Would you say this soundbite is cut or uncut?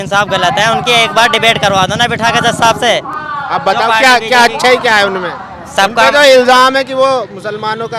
uncut